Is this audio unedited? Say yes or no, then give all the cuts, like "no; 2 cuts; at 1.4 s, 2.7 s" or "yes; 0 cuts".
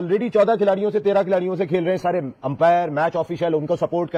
yes; 0 cuts